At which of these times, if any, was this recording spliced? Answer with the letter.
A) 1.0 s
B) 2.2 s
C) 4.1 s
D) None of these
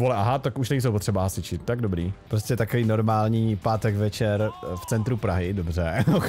B